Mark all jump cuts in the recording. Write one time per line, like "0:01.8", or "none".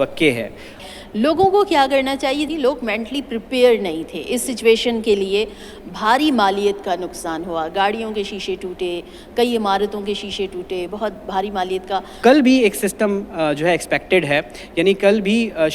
0:00.8
0:02.5
0:12.2